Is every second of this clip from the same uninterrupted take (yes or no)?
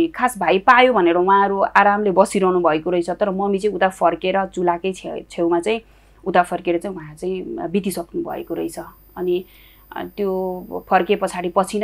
yes